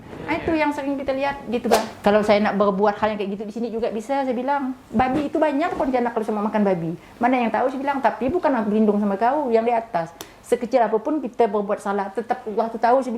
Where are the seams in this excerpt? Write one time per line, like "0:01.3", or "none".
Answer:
0:01.9

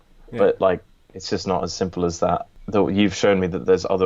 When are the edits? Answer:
0:02.5

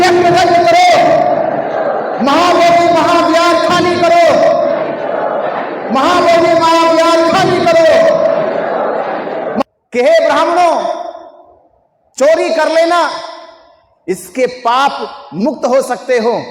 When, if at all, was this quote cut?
0:09.6

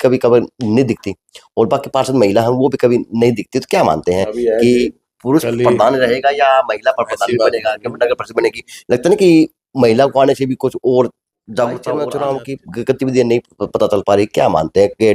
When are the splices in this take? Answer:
0:12.0

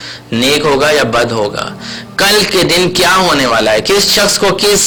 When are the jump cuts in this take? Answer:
none

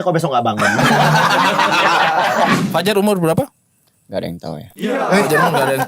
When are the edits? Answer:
0:02.6

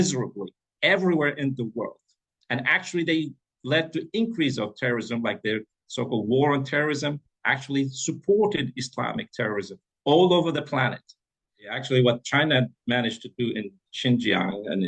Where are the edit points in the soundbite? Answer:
0:11.8

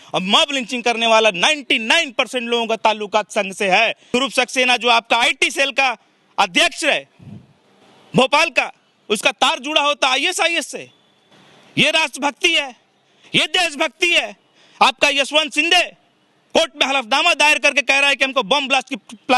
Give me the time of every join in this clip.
0:04.1

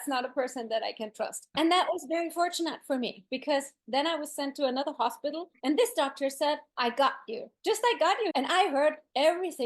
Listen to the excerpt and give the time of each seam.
0:08.3

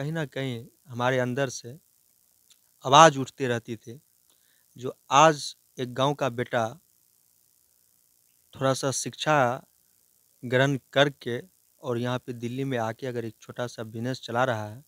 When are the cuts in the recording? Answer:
none

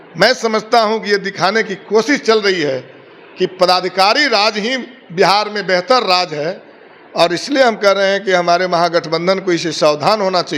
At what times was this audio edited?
none

